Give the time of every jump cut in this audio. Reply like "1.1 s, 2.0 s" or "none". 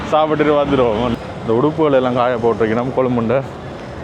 1.1 s